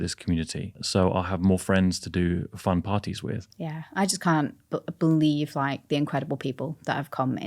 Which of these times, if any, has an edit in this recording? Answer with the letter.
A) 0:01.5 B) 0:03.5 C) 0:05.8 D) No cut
B